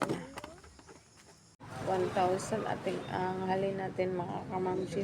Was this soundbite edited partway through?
yes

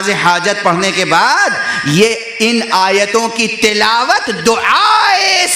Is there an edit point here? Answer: no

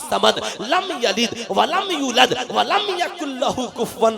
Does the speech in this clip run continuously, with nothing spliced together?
yes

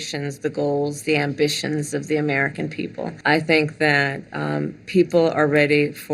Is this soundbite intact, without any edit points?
no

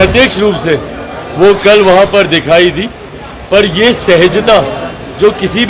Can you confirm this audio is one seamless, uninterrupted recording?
yes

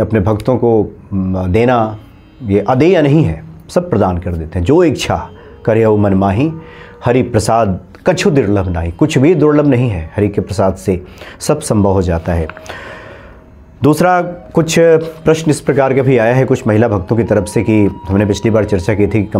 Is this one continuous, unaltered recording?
yes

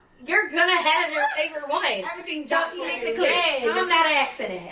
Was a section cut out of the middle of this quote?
yes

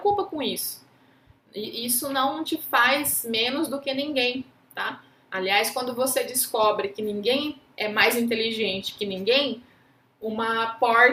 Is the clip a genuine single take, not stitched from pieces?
yes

